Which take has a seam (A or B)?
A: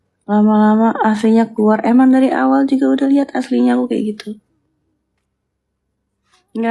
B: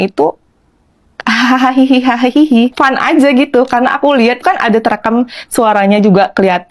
B